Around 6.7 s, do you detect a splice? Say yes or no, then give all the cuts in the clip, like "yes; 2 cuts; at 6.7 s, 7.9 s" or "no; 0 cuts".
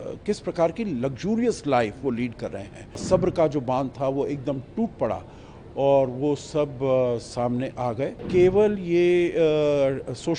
no; 2 cuts; at 3.0 s, 8.2 s